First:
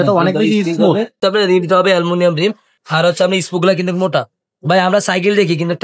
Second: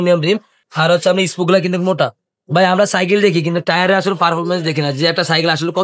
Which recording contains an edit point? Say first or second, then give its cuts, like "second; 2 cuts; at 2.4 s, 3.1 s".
first; 1 cut; at 1.2 s